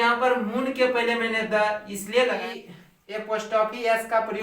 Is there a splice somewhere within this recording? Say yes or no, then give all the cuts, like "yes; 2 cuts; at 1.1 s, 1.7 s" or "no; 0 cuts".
yes; 1 cut; at 2.4 s